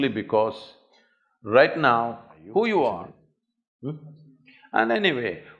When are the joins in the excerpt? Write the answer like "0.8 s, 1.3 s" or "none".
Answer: 3.1 s